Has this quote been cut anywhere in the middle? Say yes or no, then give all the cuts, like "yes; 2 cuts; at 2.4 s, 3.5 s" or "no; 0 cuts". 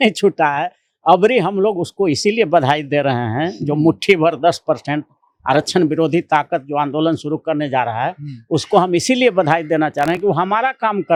no; 0 cuts